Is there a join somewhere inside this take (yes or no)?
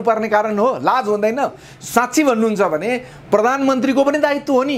no